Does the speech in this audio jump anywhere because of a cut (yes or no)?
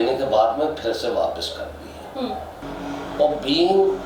yes